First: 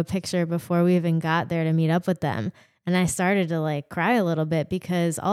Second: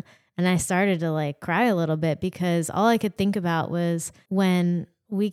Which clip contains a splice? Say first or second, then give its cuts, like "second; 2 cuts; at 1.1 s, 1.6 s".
second; 1 cut; at 4.1 s